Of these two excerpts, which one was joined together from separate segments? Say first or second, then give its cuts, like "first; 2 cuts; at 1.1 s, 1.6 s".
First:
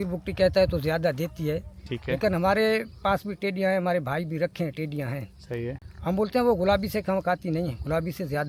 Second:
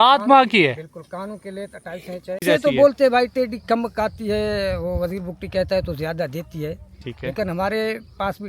second; 1 cut; at 2.4 s